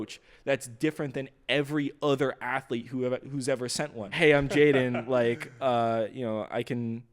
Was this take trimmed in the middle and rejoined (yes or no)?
yes